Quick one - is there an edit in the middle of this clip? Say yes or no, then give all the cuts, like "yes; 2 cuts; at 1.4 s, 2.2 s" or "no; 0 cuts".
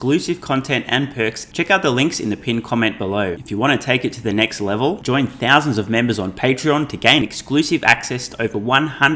yes; 2 cuts; at 1.4 s, 3.4 s